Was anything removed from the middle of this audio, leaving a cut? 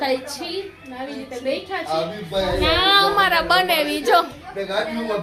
no; 0 cuts

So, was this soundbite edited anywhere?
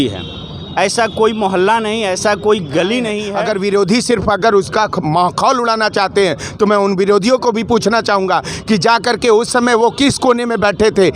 yes; 1 cut; at 3.3 s

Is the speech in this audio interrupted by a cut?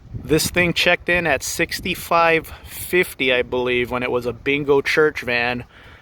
no; 0 cuts

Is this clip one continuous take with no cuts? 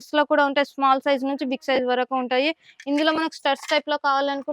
yes; 0 cuts

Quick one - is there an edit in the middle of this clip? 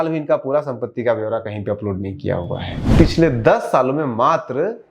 yes; 1 cut; at 2.8 s

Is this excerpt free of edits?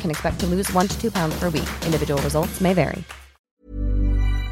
no; 1 cut; at 3.5 s

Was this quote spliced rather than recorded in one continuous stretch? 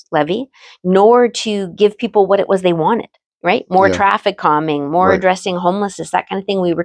yes; 1 cut; at 3.2 s

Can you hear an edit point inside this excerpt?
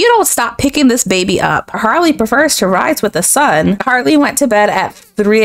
yes; 2 cuts; at 1.7 s, 3.8 s

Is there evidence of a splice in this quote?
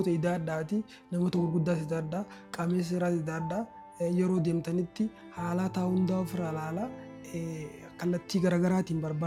no; 0 cuts

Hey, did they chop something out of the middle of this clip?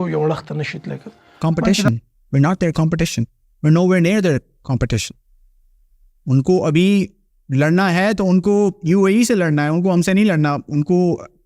yes; 1 cut; at 1.4 s

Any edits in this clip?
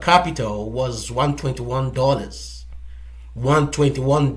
no; 0 cuts

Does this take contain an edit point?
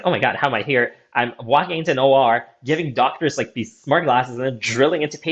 no; 0 cuts

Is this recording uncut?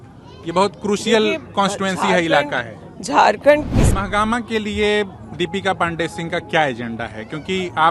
no; 1 cut; at 3.8 s

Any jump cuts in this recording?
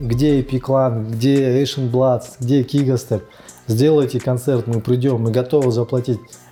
no; 0 cuts

